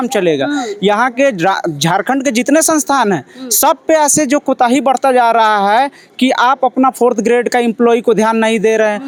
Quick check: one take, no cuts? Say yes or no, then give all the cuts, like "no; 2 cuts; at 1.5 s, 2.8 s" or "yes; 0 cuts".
yes; 0 cuts